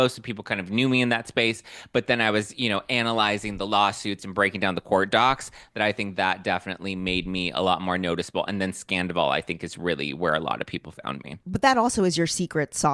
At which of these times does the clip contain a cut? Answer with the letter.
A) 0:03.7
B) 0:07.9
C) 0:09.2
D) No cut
D